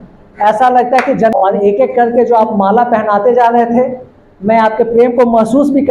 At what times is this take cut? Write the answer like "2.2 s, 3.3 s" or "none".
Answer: 1.3 s